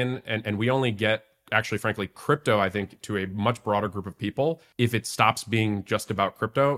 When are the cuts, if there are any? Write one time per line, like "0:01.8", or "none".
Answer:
0:04.7